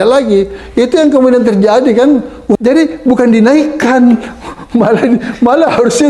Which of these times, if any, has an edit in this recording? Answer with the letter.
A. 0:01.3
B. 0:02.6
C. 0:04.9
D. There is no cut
B